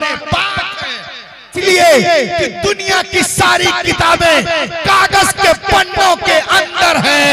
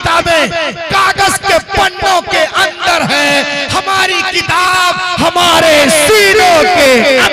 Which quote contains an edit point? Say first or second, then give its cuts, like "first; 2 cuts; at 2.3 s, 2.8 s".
first; 1 cut; at 1.6 s